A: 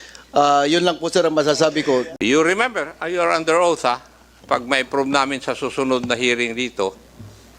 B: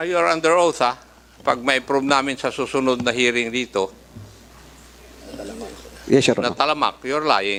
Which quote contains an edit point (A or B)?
A